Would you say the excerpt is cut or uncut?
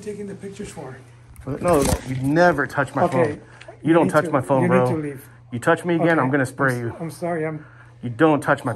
uncut